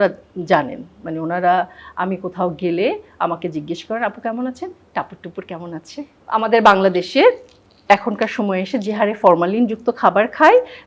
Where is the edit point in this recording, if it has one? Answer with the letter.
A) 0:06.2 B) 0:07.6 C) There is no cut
A